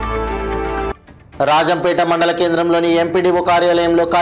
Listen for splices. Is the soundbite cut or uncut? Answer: uncut